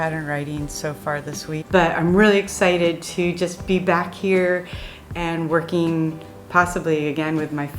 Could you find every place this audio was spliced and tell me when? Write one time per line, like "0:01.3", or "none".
0:01.6